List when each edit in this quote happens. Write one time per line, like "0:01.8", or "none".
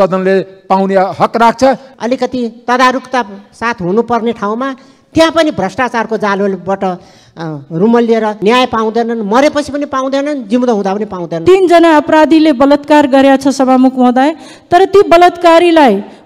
0:01.9
0:08.4
0:11.3